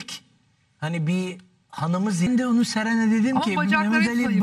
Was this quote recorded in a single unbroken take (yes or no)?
no